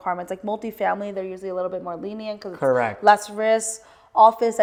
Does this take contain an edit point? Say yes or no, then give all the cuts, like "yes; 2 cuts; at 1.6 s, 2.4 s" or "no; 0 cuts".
no; 0 cuts